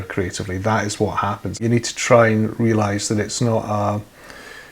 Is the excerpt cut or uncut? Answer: cut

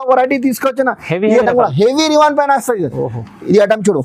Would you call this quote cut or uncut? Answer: uncut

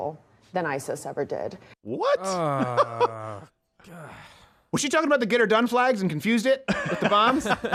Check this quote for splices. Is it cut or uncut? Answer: uncut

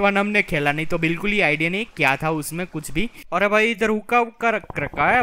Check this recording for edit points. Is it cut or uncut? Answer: cut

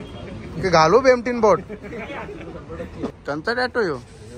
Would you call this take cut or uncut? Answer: cut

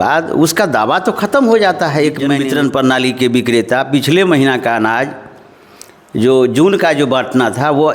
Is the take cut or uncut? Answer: cut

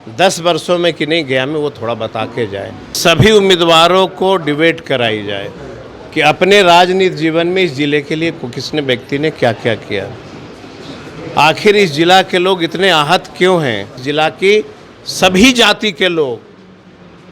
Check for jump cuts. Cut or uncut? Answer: cut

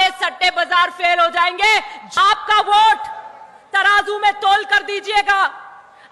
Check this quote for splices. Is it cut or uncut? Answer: cut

